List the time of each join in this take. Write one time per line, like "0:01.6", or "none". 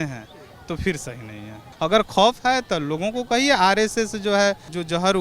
0:01.6